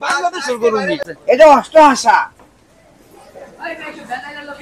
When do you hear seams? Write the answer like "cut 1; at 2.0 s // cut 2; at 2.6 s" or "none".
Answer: cut 1; at 1.1 s